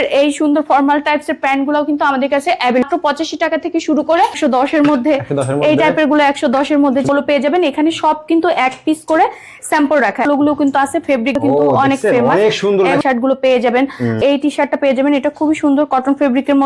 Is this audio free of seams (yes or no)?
no